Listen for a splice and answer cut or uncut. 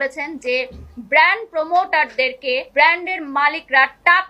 cut